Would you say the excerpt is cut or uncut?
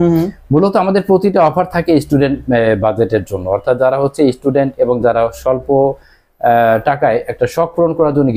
uncut